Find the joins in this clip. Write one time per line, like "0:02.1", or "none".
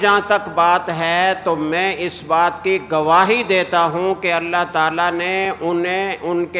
none